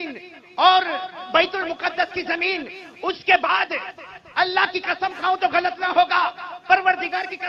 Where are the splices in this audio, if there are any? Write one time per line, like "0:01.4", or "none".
none